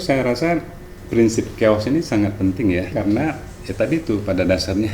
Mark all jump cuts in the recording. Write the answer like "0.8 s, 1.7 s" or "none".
2.9 s